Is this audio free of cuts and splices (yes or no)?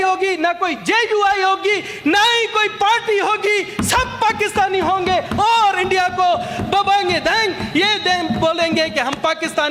yes